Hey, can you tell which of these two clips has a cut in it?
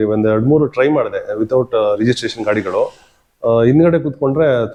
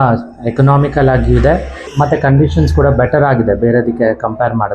second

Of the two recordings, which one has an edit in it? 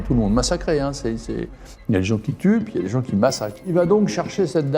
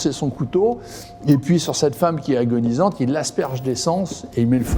first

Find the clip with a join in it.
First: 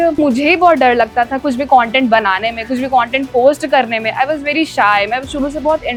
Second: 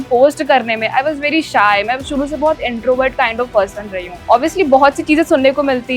second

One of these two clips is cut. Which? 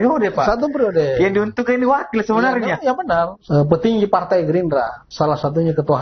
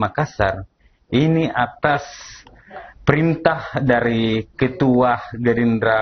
first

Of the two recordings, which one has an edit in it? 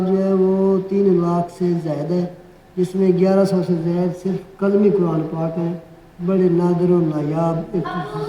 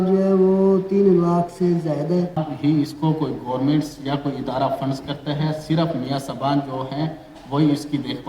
second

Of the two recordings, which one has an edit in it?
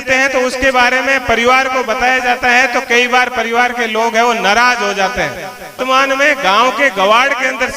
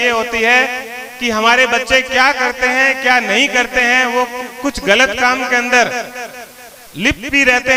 first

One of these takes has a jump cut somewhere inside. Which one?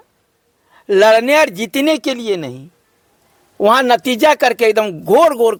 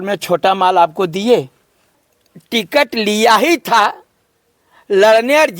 second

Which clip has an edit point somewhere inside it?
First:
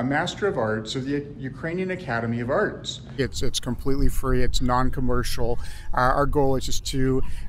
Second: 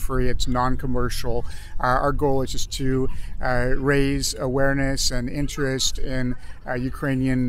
first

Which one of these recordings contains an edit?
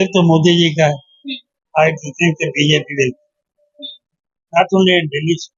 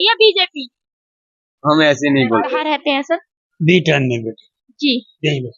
second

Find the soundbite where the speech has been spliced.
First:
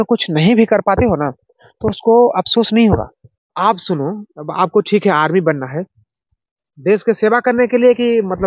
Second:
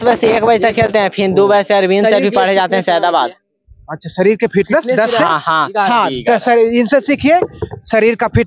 first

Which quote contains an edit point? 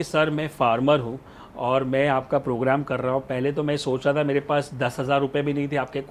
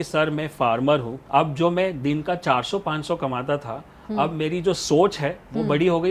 second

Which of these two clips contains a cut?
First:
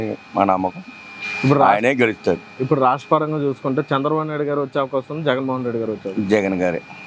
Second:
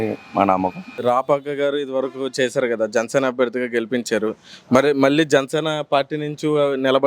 second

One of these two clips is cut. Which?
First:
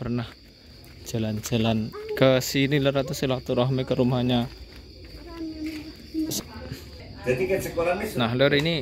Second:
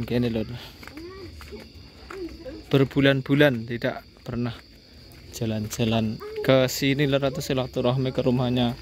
first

